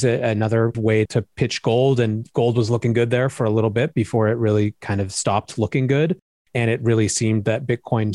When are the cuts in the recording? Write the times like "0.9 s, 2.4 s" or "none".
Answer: 0.9 s